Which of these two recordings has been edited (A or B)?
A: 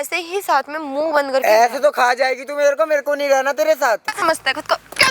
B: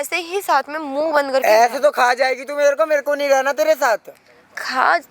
A